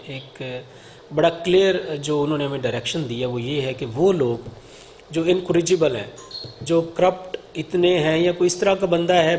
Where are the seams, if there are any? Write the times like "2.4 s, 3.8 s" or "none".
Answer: none